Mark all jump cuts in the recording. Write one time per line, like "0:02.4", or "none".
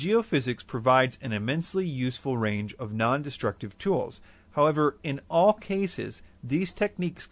none